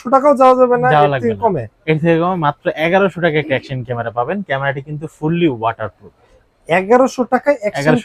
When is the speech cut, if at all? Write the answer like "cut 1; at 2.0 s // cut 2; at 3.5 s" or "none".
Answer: none